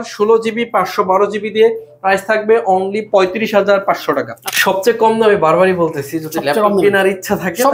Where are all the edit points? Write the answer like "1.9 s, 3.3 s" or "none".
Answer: 4.4 s